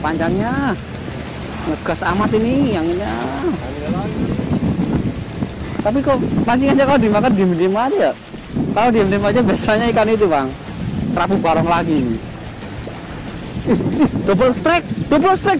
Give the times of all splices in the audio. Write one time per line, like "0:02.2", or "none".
none